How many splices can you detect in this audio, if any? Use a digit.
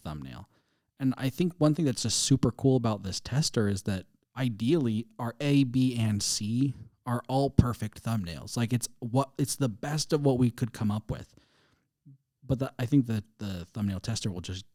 0